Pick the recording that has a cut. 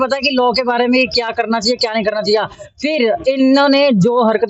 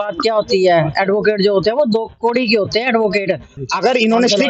second; 1 cut; at 3.5 s

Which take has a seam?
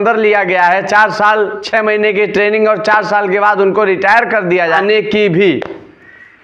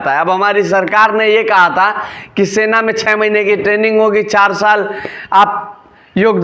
first; 1 cut; at 4.8 s

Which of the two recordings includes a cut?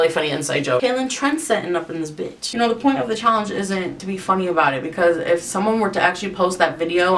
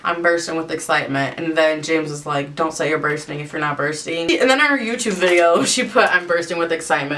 first; 3 cuts; at 0.8 s, 2.5 s, 4.0 s

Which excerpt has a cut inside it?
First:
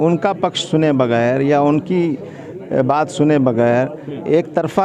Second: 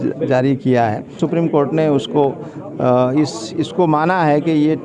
second; 1 cut; at 1.2 s

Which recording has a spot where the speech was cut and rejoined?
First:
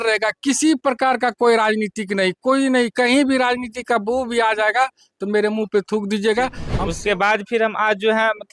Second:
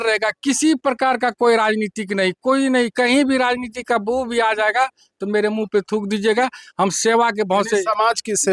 first; 1 cut; at 6.7 s

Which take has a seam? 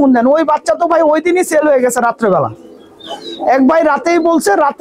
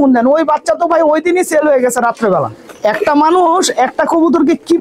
second; 1 cut; at 2.6 s

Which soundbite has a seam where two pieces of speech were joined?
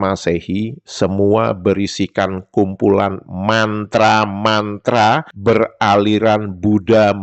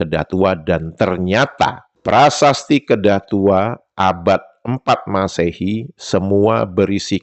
second; 1 cut; at 2.0 s

